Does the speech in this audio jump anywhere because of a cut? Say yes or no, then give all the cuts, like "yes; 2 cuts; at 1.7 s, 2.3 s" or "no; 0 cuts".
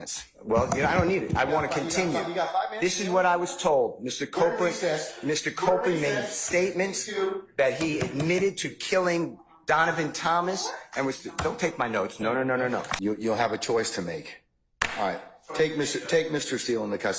yes; 1 cut; at 12.9 s